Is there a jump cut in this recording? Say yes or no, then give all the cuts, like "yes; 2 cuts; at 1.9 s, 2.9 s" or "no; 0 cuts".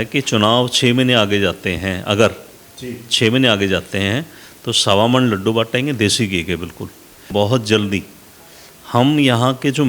yes; 1 cut; at 7.3 s